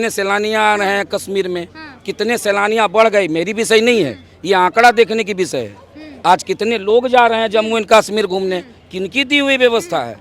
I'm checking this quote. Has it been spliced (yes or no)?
no